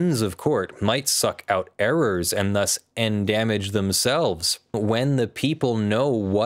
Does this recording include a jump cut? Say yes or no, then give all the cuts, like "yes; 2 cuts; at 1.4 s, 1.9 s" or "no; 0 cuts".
yes; 1 cut; at 4.7 s